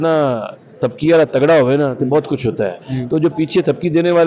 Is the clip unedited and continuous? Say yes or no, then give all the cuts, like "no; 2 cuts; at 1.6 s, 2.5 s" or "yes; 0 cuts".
yes; 0 cuts